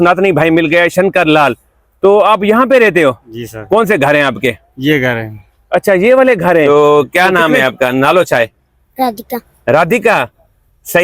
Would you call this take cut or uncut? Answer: cut